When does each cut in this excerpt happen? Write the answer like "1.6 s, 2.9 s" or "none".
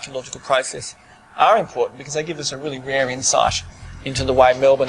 none